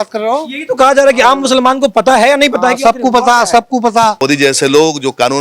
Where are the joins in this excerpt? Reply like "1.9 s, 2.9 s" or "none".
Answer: 4.2 s